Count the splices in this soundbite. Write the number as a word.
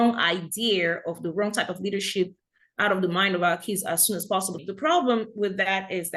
one